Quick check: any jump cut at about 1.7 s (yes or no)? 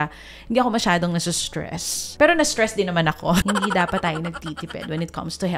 no